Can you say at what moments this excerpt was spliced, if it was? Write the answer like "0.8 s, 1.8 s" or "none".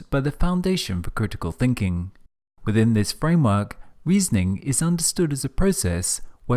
5.1 s